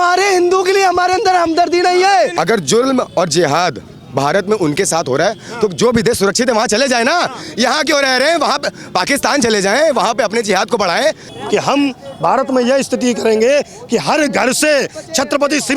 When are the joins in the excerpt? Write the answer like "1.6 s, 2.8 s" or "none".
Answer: 2.3 s, 11.3 s